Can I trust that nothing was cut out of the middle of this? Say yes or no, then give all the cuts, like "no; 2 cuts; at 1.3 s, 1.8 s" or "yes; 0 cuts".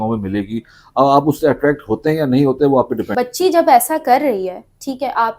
no; 1 cut; at 3.1 s